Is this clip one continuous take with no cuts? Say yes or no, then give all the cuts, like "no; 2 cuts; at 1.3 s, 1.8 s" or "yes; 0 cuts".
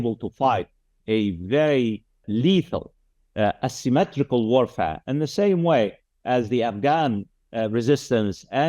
no; 1 cut; at 2.2 s